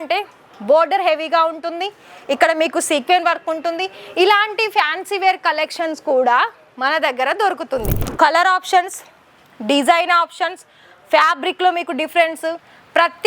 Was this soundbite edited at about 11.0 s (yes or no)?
no